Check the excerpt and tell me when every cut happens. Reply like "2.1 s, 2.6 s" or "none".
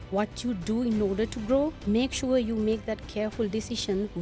1.8 s